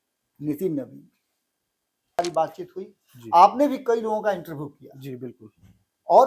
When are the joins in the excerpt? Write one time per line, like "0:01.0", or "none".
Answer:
0:02.2